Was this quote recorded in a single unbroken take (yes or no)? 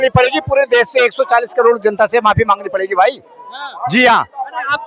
yes